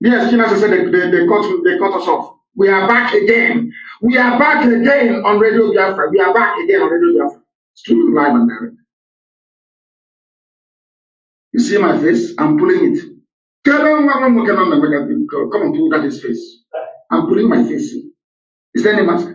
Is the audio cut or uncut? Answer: uncut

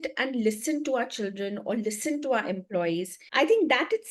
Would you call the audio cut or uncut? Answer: cut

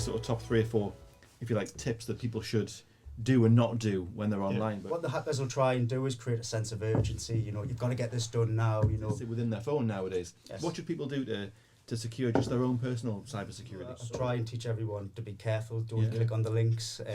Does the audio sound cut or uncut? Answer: cut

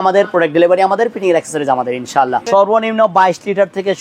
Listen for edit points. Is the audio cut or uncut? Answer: cut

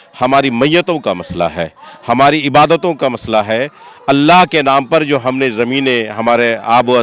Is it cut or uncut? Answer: uncut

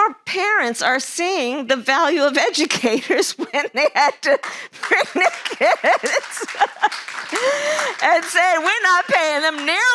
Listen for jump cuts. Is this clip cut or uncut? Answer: uncut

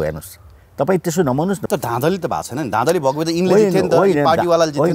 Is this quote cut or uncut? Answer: cut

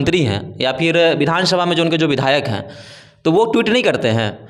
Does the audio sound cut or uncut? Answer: uncut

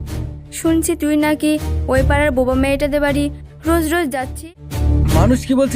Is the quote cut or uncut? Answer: cut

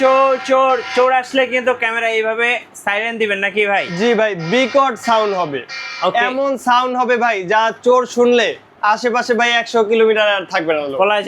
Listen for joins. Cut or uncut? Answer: uncut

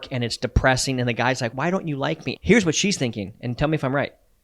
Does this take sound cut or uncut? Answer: cut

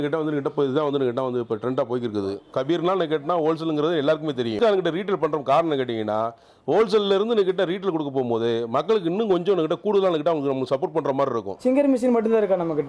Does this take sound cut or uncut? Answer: cut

